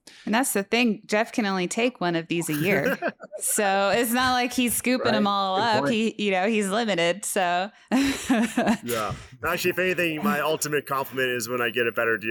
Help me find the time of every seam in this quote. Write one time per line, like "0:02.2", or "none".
none